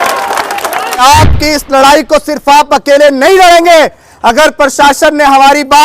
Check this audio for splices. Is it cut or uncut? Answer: cut